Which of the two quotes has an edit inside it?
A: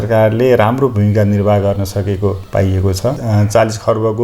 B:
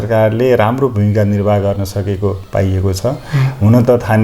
A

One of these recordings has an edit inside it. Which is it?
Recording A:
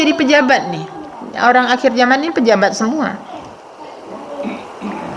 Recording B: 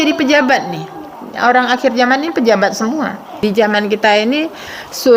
B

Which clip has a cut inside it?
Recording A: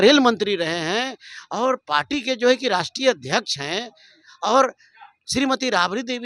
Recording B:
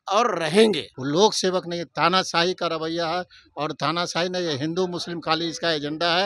B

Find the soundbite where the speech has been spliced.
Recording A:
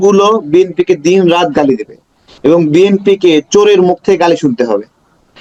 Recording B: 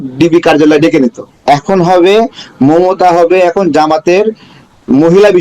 B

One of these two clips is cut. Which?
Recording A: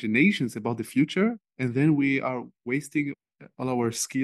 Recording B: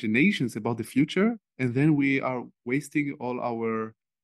A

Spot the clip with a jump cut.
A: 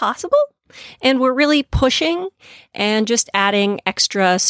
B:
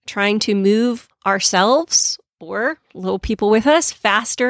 B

